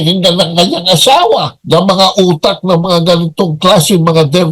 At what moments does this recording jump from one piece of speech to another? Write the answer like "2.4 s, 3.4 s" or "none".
1.5 s